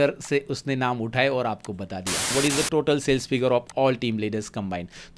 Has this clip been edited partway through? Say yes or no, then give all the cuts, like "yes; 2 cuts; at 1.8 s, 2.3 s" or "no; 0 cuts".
yes; 1 cut; at 2.2 s